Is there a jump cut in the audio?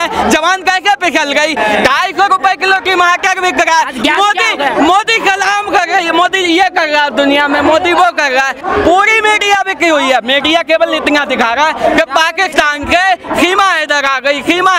yes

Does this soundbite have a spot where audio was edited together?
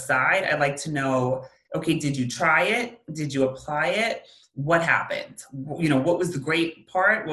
no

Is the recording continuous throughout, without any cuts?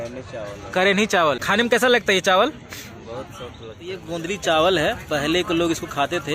no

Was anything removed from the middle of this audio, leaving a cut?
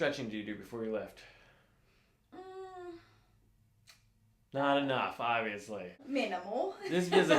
yes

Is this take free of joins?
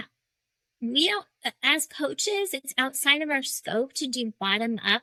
yes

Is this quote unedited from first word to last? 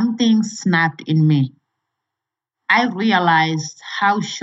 yes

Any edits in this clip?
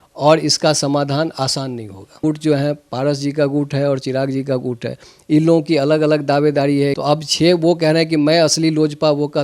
yes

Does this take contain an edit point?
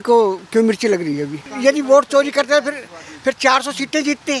yes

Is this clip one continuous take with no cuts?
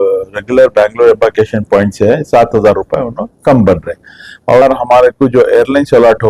no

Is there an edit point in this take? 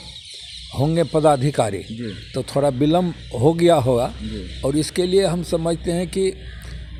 no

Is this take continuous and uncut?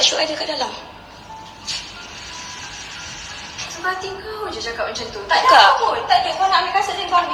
yes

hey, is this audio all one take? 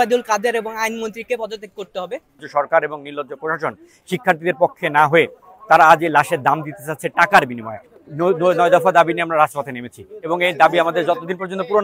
no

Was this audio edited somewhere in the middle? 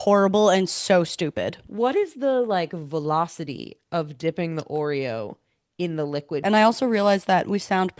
yes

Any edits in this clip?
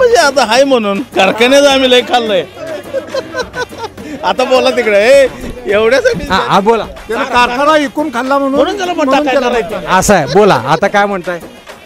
no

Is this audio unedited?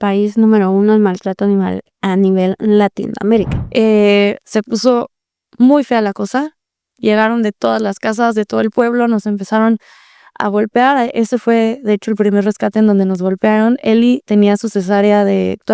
no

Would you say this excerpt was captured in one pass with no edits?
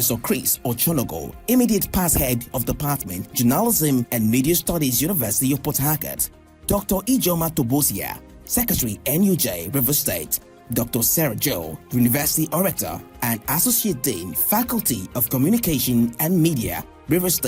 yes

